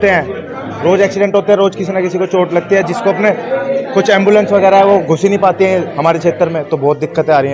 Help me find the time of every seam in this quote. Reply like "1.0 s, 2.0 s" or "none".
none